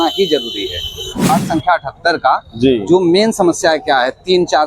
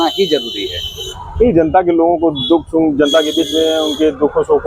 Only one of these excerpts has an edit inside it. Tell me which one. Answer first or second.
first